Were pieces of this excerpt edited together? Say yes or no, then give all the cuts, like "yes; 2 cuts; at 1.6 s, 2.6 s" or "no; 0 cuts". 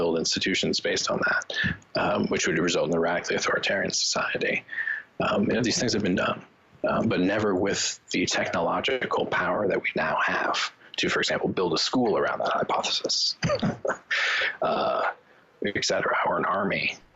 no; 0 cuts